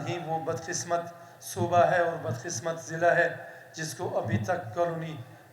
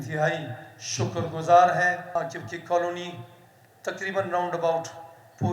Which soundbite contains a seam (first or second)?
second